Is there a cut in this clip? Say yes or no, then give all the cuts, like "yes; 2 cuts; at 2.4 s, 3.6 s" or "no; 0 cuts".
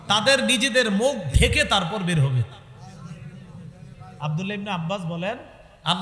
no; 0 cuts